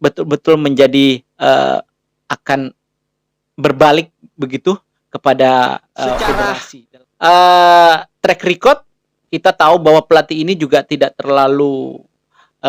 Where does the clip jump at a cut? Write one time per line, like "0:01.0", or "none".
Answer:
0:06.5